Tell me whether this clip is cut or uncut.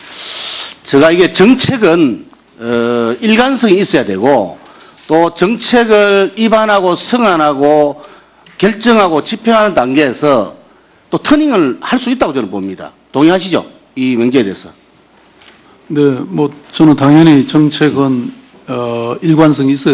cut